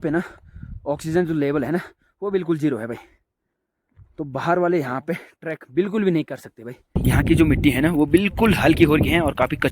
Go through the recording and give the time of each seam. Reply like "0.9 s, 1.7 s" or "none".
7.0 s